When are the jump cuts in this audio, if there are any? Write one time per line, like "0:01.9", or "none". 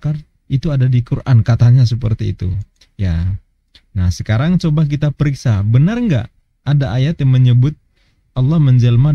none

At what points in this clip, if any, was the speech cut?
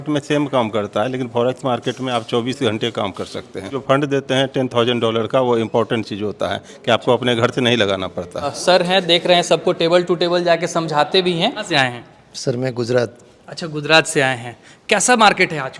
0:03.8
0:08.6
0:11.6

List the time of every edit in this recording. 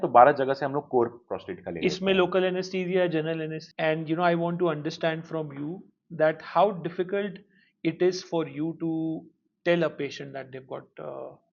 0:03.6

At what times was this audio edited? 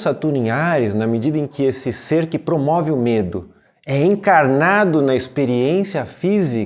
none

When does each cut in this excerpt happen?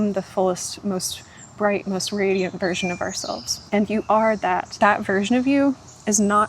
0:03.5
0:04.7

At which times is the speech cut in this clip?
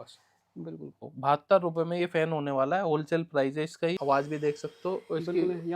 0:01.0
0:04.0

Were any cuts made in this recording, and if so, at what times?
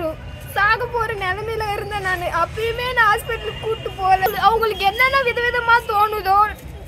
0:04.3

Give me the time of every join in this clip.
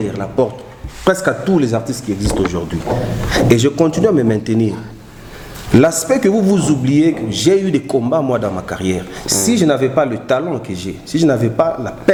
none

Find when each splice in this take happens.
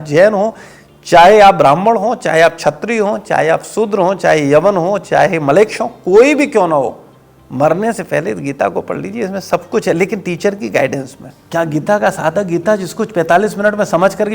0:11.4

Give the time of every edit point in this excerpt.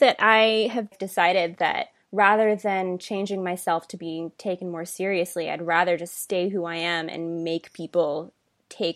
0:00.9
0:01.9

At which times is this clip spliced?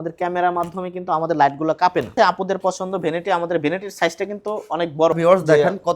0:02.1
0:05.2

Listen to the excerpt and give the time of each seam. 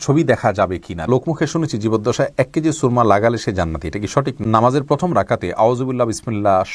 0:01.1
0:04.4

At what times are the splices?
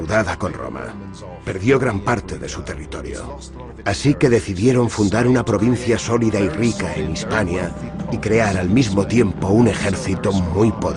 0:04.7

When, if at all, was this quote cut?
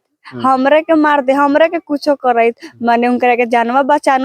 none

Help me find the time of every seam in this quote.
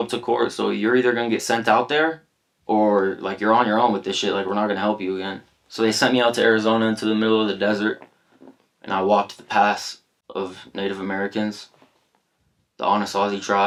none

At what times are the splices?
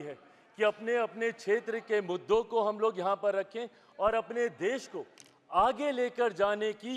none

